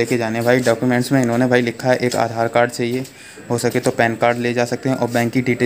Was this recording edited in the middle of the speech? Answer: no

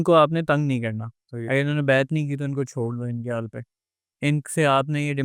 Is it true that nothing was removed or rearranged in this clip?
yes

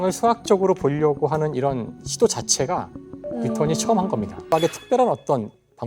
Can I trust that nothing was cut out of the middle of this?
no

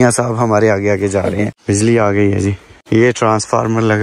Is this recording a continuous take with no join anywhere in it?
yes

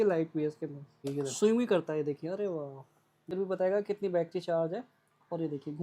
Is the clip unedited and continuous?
no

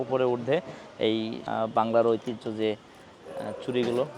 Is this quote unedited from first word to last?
no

